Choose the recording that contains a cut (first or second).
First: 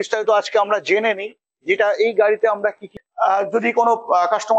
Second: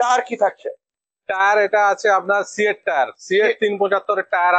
first